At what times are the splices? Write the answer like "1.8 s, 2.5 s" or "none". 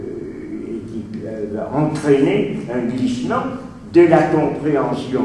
none